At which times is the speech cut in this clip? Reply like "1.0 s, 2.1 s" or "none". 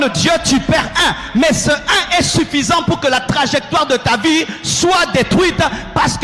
none